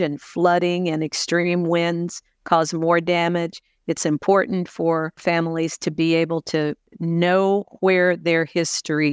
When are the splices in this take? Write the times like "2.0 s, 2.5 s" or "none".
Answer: 5.2 s, 6.9 s

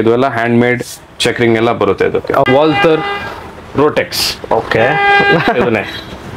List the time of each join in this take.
2.5 s

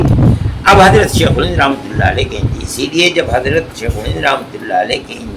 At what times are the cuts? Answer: none

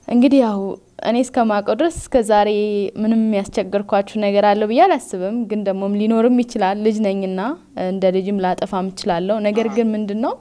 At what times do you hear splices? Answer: none

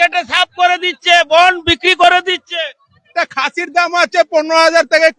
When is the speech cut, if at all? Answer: 3.1 s

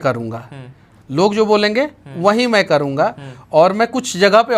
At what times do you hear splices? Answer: none

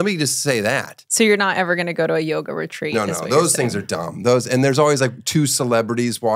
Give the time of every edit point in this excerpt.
1.0 s

